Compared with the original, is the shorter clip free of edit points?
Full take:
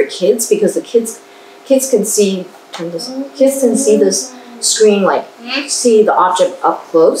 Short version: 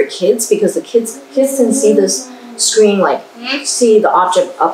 no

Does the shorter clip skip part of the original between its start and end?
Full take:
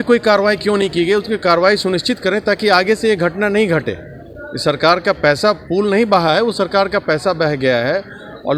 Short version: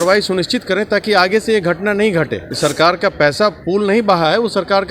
yes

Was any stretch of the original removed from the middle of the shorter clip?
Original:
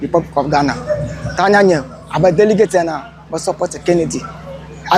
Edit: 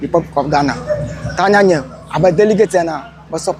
no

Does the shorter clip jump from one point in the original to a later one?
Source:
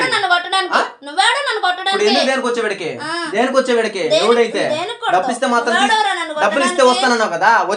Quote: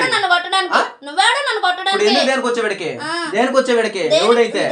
no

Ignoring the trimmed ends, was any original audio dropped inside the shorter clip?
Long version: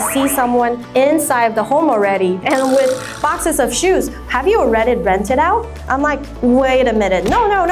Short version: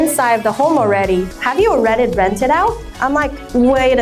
yes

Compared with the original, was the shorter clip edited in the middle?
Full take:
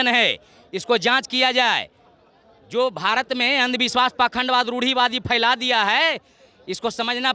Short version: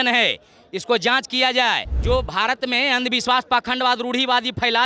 yes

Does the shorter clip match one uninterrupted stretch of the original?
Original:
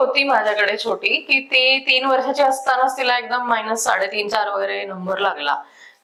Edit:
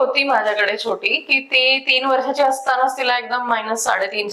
yes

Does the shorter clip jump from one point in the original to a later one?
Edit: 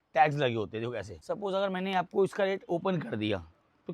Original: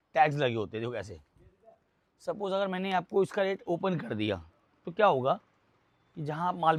yes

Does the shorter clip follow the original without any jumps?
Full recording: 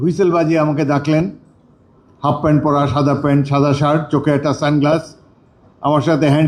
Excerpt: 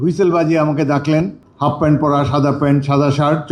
no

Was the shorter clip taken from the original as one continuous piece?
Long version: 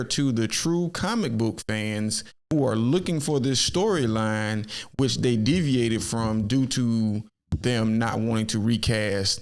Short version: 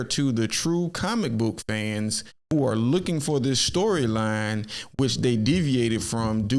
yes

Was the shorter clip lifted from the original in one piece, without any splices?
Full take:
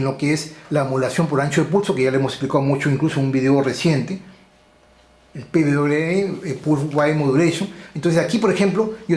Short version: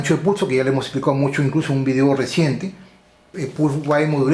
no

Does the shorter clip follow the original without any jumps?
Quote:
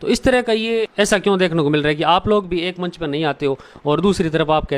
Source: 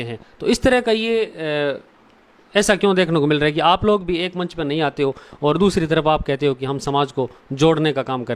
no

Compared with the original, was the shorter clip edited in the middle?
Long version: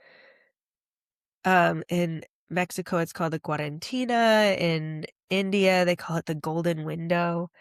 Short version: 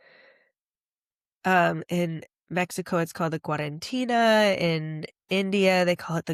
no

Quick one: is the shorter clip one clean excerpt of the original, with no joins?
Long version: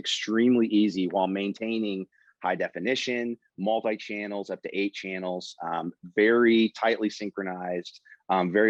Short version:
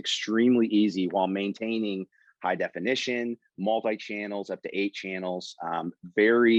yes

